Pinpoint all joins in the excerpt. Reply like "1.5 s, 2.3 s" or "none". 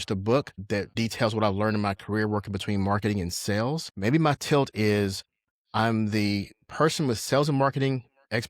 0.9 s, 3.9 s